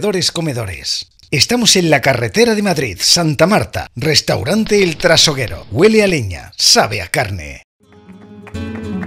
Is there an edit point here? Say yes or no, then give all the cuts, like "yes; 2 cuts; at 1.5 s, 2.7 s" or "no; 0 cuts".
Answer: yes; 1 cut; at 7.8 s